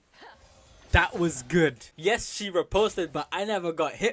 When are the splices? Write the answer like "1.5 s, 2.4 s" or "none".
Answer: 1.9 s